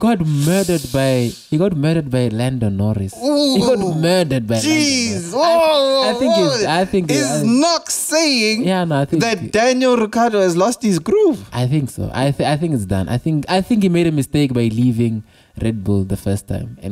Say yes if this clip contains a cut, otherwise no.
no